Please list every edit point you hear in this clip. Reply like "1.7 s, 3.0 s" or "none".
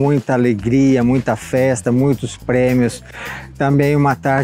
none